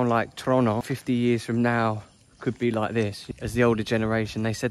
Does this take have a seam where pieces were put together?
yes; 2 cuts; at 0.9 s, 3.2 s

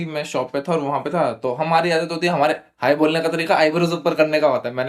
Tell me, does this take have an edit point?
no; 0 cuts

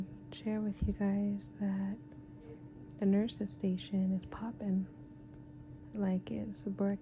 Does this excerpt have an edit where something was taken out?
no; 0 cuts

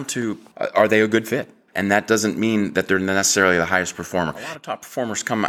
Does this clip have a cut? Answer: yes; 2 cuts; at 1.6 s, 4.5 s

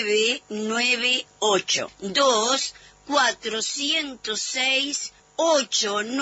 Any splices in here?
no; 0 cuts

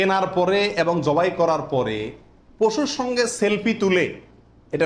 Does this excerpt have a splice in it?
no; 0 cuts

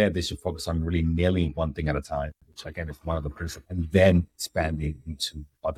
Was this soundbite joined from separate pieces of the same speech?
yes; 1 cut; at 3.6 s

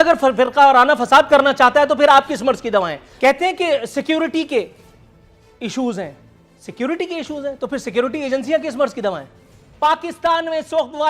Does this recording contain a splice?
yes; 2 cuts; at 3.0 s, 9.6 s

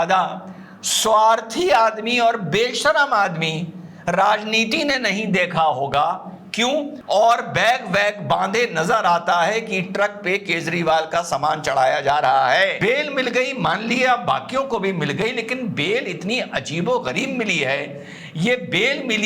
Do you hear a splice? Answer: yes; 2 cuts; at 6.9 s, 12.8 s

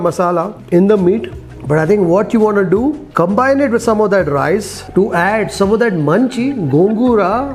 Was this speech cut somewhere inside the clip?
no; 0 cuts

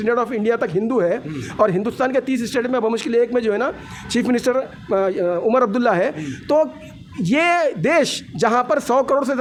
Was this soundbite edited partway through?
no; 0 cuts

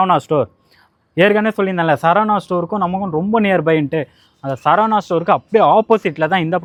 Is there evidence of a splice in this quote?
no; 0 cuts

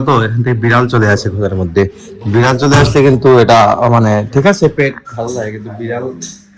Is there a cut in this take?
no; 0 cuts

